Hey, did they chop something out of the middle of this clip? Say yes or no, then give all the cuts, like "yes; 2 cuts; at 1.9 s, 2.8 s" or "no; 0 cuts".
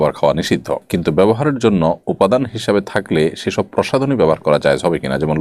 no; 0 cuts